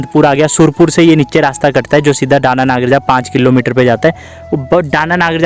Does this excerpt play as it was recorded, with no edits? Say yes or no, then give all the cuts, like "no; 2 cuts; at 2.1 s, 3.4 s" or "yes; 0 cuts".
yes; 0 cuts